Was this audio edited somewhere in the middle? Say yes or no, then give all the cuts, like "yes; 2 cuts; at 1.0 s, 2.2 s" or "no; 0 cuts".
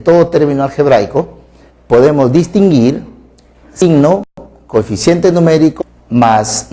no; 0 cuts